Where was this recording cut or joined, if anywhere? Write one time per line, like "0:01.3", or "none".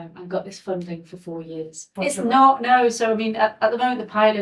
0:01.8